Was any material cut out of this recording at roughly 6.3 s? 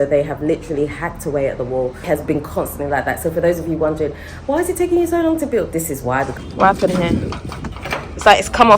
yes; 2 cuts; at 2.0 s, 6.3 s

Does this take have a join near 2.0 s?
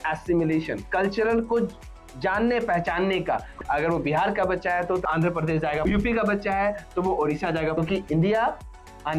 no; 3 cuts; at 3.5 s, 5.8 s, 7.7 s

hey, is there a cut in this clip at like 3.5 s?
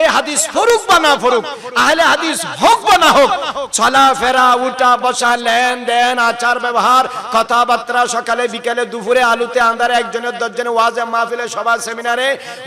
no; 0 cuts

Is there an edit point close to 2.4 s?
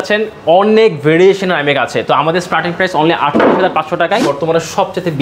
no; 1 cut; at 4.2 s

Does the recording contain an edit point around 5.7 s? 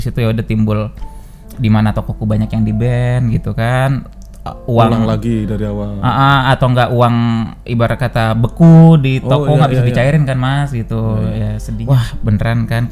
no; 1 cut; at 11.7 s

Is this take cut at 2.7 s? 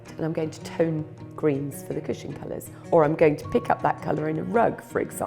yes; 1 cut; at 2.7 s

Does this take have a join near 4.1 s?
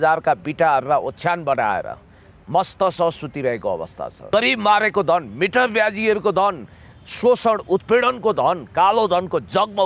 yes; 1 cut; at 4.1 s

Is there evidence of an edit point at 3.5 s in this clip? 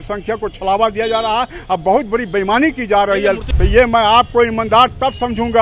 yes; 1 cut; at 3.5 s

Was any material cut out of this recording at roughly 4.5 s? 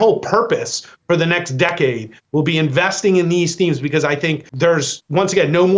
yes; 1 cut; at 4.5 s

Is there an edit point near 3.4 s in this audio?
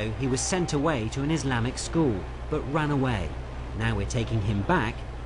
no; 1 cut; at 1.7 s

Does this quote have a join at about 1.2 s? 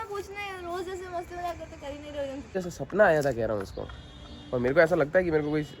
no; 1 cut; at 2.7 s

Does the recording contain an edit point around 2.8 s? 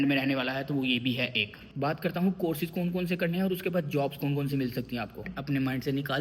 no; 2 cuts; at 1.5 s, 5.3 s

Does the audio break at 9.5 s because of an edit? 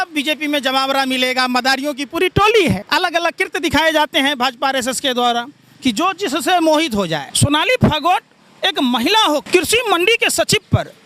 yes; 3 cuts; at 2.8 s, 7.2 s, 9.5 s

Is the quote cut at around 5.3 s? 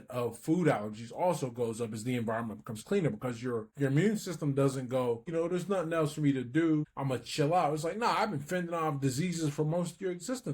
yes; 3 cuts; at 3.7 s, 5.3 s, 6.9 s

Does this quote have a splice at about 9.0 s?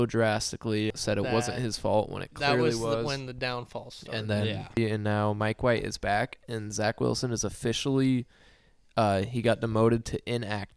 no; 2 cuts; at 0.9 s, 4.8 s

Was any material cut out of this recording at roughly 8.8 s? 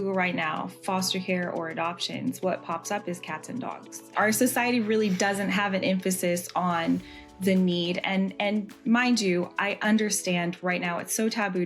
no; 1 cut; at 4.2 s

